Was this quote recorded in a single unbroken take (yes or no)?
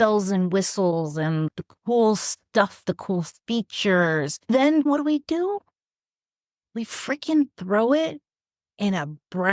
no